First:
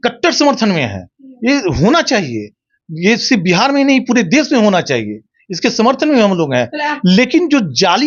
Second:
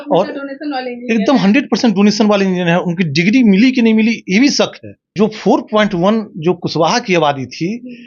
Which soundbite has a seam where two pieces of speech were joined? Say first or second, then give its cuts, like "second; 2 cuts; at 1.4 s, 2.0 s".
second; 1 cut; at 5.1 s